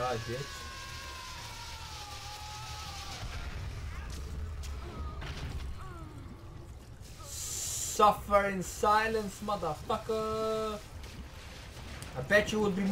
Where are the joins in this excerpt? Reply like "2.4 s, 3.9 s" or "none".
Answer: none